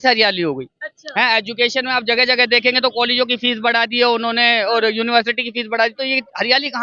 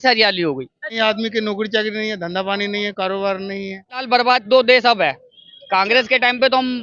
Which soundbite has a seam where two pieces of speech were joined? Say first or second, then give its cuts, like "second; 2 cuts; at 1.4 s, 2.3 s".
second; 2 cuts; at 0.9 s, 4.0 s